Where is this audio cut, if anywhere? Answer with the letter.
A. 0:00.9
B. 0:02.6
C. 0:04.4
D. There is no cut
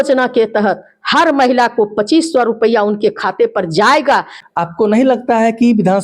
C